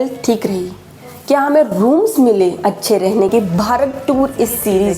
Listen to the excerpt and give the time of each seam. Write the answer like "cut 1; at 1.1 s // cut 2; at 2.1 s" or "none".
cut 1; at 3.3 s